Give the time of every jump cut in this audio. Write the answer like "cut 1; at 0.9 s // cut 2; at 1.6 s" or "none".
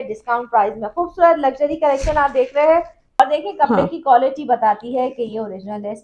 cut 1; at 3.2 s